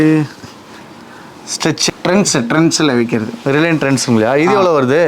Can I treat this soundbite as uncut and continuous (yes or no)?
no